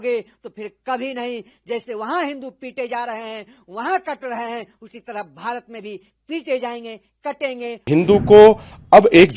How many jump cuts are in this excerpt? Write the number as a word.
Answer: one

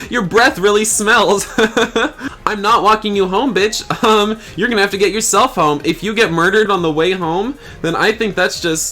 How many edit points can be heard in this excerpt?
two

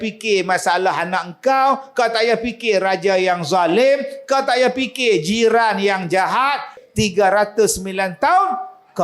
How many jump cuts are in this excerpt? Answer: one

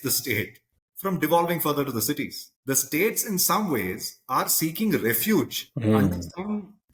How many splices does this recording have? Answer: zero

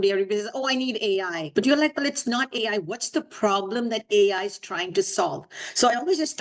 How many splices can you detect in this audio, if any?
one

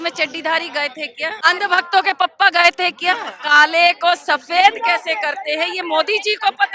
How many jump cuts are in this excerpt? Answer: two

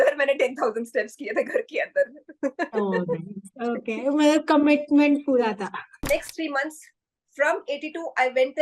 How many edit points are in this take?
one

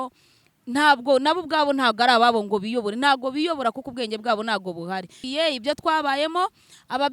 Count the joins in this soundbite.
one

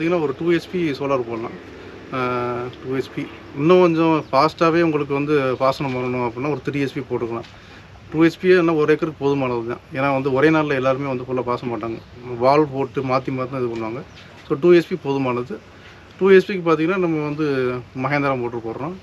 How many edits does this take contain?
zero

